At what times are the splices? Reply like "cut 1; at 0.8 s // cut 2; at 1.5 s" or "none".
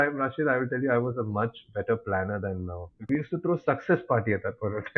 cut 1; at 3.1 s